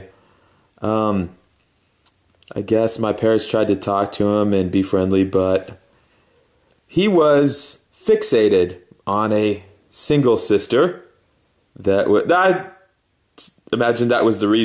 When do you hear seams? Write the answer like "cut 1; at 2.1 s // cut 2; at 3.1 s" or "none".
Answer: cut 1; at 4.2 s